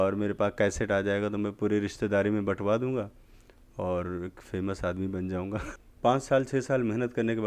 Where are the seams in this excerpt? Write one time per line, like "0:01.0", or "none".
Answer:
0:05.6